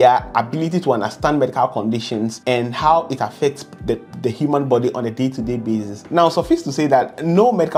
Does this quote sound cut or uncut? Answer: uncut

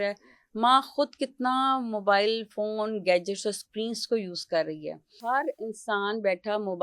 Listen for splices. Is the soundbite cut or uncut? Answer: cut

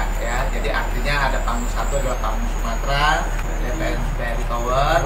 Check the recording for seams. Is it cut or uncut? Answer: cut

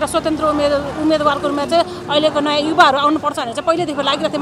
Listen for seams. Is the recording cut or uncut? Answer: uncut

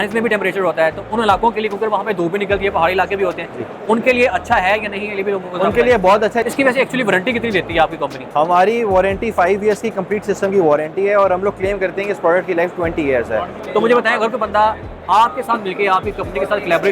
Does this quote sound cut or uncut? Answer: cut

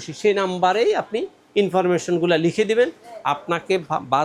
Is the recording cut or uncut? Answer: uncut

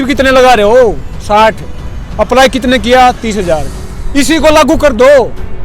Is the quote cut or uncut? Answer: cut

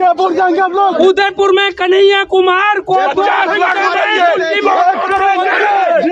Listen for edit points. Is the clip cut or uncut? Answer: cut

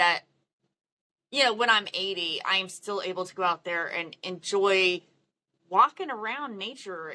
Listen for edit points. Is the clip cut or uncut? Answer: uncut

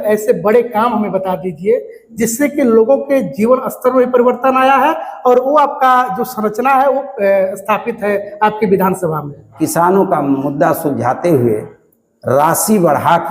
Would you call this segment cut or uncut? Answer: cut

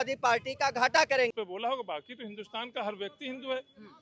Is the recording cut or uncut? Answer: cut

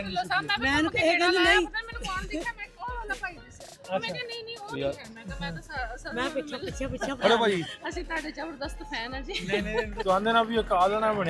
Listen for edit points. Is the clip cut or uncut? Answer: cut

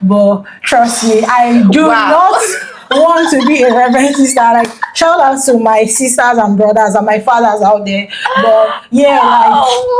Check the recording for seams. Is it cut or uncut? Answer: uncut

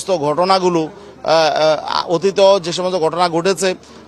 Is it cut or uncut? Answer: uncut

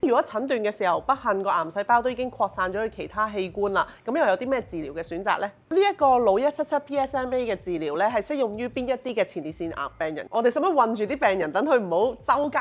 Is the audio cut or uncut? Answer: cut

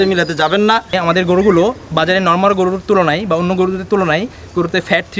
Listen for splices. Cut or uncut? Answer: cut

